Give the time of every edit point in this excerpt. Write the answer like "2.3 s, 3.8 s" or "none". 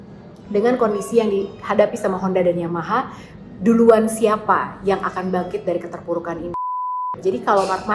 7.0 s